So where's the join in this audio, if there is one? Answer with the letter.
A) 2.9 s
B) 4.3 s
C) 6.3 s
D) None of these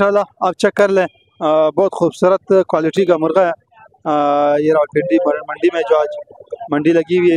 D